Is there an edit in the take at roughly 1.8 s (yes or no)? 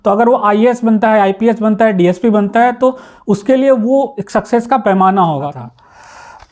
no